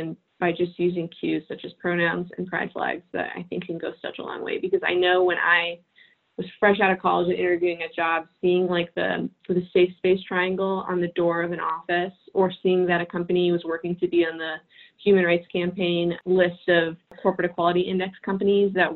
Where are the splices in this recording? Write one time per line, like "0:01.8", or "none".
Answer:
0:16.2
0:17.0